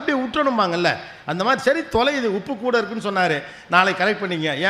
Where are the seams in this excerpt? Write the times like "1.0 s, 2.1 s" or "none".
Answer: none